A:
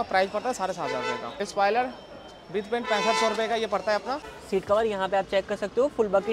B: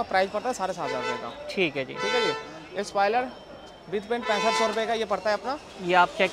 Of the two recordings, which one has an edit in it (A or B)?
A